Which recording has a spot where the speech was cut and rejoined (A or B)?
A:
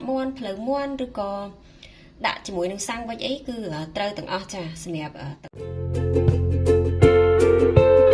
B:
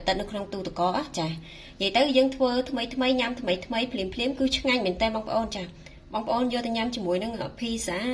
A